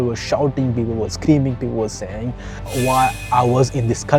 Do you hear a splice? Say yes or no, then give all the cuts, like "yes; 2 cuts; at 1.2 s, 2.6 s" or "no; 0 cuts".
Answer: no; 0 cuts